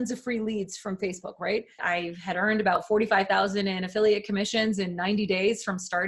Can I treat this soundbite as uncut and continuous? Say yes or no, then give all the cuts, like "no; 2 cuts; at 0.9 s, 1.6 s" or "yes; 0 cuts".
no; 1 cut; at 1.8 s